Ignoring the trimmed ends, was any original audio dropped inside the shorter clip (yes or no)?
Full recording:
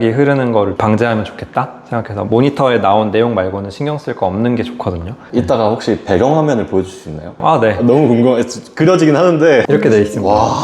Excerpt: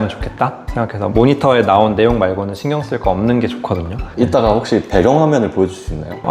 no